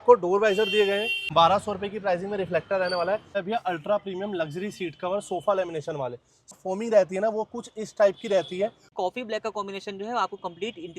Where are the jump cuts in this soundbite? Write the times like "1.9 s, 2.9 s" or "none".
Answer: 1.2 s, 3.3 s, 6.5 s, 8.8 s